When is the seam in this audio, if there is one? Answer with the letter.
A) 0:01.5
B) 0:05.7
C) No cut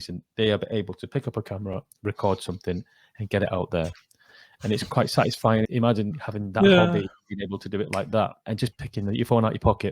B